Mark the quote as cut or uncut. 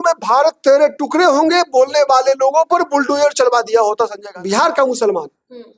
cut